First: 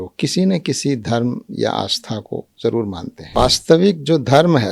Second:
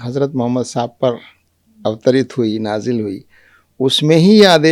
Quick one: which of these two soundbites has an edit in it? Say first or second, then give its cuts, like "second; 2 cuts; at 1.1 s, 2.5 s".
first; 1 cut; at 3.2 s